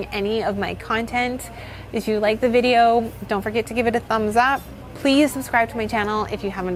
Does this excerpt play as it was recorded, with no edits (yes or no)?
yes